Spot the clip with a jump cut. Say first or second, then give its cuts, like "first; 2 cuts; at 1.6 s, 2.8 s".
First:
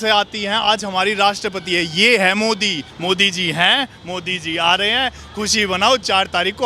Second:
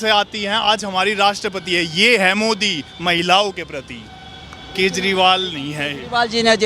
first; 1 cut; at 2.9 s